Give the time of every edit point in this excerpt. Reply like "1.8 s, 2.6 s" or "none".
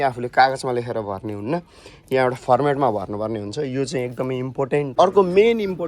4.9 s